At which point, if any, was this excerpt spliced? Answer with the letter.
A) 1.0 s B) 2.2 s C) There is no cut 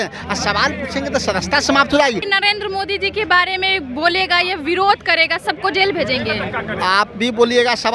B